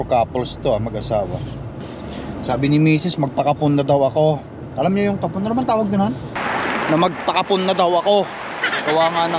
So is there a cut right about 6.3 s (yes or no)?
yes